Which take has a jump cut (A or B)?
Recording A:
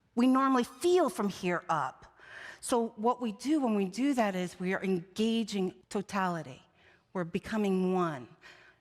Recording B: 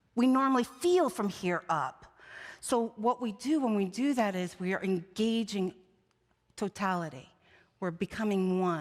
A